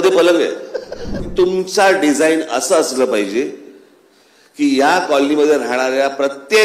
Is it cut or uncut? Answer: cut